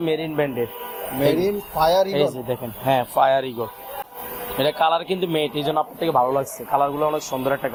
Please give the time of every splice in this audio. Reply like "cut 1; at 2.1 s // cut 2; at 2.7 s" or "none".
none